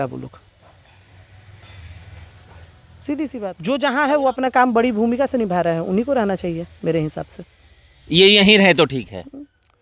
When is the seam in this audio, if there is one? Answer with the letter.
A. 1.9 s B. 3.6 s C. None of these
B